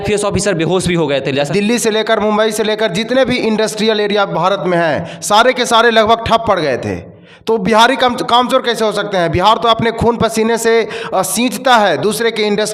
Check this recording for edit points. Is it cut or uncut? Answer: cut